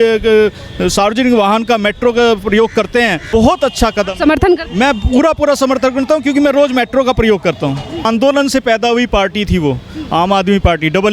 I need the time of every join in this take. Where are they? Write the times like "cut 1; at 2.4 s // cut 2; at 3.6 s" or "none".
cut 1; at 3.2 s // cut 2; at 8.0 s